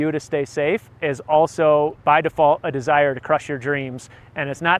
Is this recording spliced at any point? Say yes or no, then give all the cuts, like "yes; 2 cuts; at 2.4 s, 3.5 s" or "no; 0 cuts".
yes; 1 cut; at 2.0 s